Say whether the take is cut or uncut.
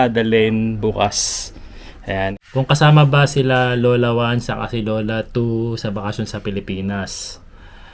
cut